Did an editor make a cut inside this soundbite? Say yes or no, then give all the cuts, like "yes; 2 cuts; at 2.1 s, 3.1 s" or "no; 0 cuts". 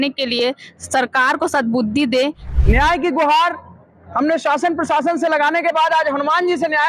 yes; 1 cut; at 2.5 s